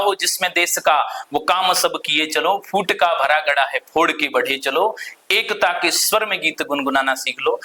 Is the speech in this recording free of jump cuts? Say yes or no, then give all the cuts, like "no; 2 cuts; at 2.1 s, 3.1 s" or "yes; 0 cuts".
yes; 0 cuts